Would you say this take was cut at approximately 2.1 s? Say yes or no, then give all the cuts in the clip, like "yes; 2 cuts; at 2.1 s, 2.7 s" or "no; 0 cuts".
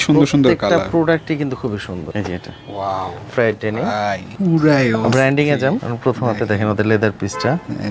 yes; 1 cut; at 2.1 s